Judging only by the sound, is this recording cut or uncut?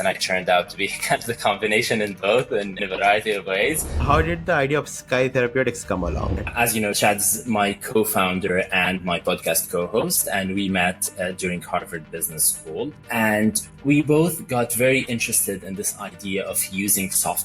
cut